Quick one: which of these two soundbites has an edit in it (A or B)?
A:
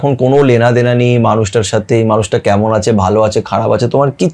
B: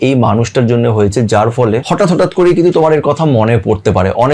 B